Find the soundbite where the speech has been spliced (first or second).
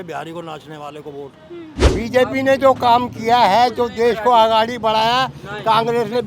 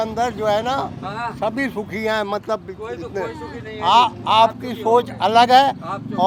first